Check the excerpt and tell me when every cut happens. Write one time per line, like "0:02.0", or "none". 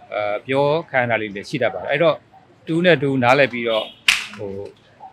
none